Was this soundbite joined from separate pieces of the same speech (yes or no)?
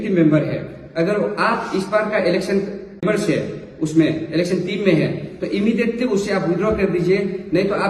yes